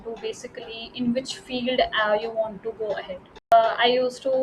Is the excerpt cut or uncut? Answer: cut